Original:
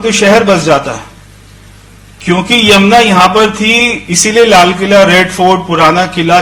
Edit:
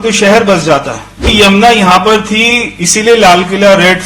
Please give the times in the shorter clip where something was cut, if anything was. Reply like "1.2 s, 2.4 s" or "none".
1.2 s